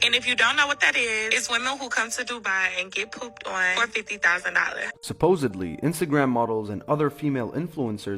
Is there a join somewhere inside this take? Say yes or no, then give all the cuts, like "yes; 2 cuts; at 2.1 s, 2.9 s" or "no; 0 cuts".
yes; 1 cut; at 4.6 s